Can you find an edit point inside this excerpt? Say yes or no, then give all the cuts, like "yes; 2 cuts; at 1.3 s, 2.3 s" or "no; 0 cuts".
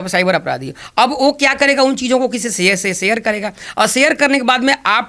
no; 0 cuts